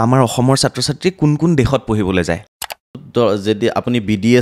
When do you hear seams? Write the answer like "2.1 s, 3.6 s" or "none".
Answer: 2.8 s